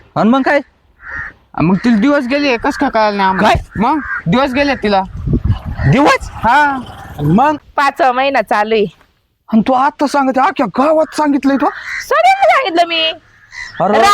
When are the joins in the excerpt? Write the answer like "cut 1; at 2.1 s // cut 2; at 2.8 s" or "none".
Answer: cut 1; at 7.5 s